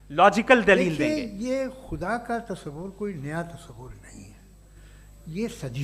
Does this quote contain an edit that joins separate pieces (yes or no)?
yes